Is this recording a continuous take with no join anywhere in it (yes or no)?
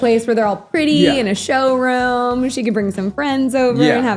yes